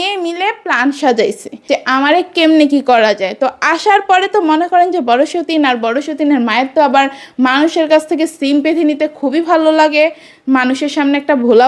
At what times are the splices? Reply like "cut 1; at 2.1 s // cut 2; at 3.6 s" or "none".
none